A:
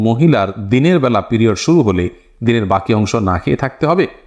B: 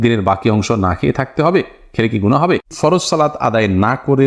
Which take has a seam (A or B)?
B